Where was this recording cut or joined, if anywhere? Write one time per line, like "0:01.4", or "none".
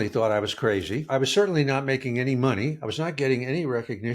0:01.1